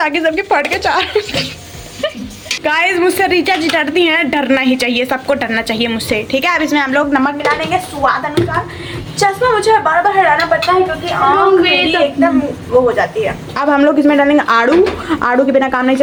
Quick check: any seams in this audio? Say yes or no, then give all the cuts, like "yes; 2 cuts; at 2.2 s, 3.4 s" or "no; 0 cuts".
no; 0 cuts